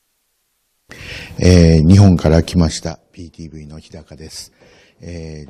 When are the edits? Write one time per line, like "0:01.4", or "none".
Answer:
none